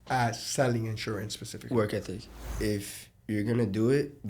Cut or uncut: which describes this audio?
cut